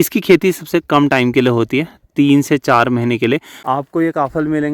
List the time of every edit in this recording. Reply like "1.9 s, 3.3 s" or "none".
3.5 s